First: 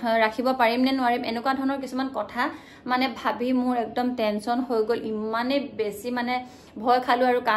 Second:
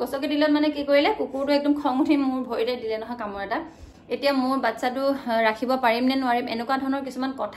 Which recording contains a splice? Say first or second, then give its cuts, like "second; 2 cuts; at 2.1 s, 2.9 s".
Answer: second; 1 cut; at 3.9 s